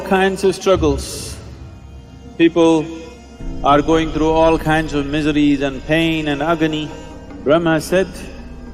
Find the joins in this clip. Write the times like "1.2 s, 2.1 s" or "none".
none